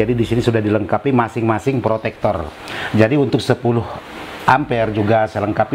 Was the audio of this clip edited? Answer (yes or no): no